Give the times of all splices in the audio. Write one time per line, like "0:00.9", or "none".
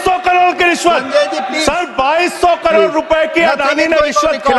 0:01.5